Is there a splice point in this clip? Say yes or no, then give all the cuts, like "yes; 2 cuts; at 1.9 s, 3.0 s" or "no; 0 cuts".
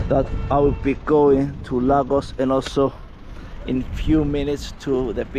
no; 0 cuts